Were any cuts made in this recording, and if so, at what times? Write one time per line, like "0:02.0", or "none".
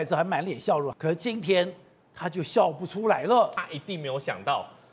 0:00.9
0:03.6